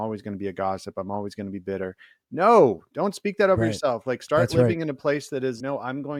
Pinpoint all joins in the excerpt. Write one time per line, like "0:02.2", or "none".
none